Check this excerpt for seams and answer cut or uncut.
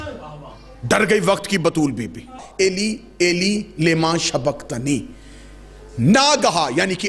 cut